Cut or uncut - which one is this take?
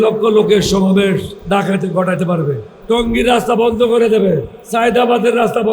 cut